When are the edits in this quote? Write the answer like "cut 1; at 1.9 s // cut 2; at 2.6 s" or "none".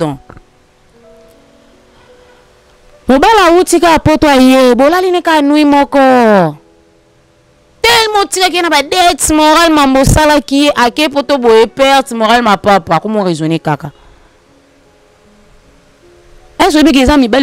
none